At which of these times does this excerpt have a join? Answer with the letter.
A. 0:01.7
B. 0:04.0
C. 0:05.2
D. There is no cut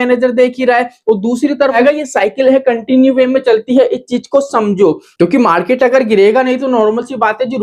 A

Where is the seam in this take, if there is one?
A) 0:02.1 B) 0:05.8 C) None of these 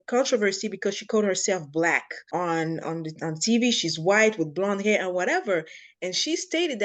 A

